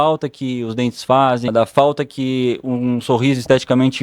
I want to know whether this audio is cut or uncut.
cut